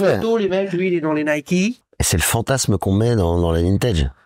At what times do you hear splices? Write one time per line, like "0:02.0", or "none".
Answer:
0:01.8